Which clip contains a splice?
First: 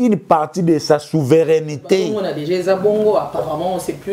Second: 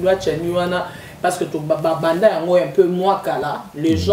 first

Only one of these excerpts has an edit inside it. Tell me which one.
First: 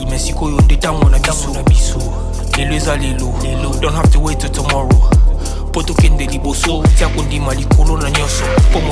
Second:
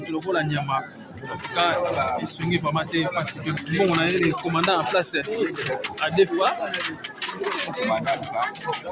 second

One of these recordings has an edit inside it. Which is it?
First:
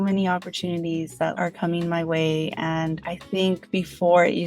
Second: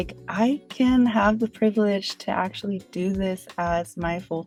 first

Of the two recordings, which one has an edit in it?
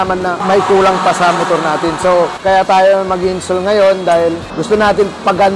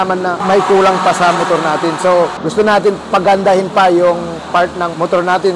second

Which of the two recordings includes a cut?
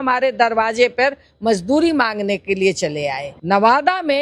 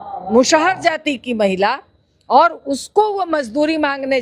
first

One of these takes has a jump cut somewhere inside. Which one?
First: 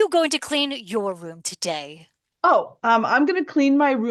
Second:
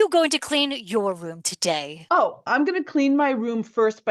second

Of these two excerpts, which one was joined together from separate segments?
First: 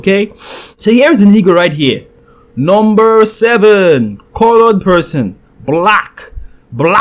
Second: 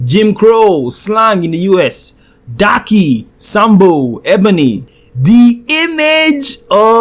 second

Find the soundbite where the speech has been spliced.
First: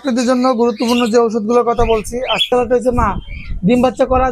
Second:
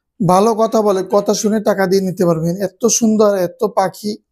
first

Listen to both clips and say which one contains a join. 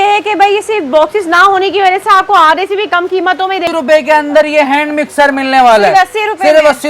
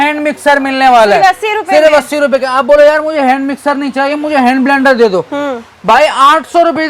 first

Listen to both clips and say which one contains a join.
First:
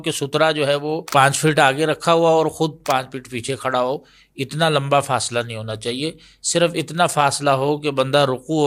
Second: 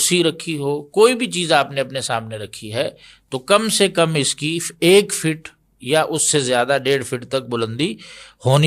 first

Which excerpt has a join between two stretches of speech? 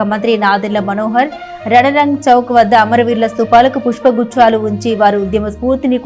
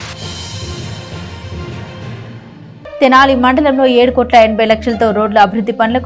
second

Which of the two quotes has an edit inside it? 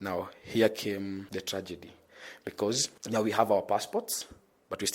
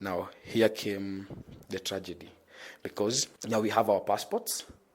first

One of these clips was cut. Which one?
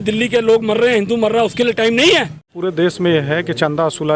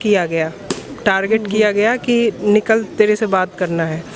first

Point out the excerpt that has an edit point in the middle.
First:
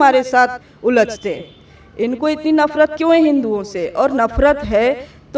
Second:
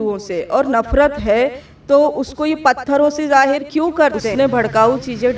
second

